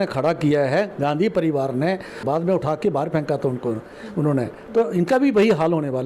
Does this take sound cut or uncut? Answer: cut